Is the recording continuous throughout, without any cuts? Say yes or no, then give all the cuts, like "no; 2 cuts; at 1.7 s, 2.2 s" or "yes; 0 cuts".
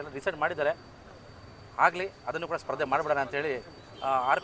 yes; 0 cuts